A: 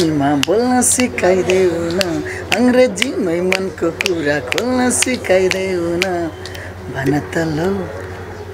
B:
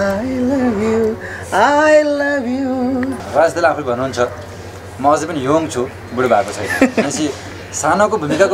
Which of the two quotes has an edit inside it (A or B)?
B